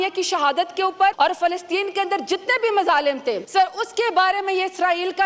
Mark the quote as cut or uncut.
cut